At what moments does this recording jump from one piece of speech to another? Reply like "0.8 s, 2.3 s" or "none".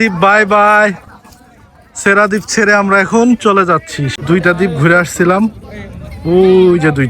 4.0 s